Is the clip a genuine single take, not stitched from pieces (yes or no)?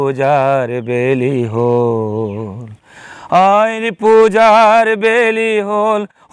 yes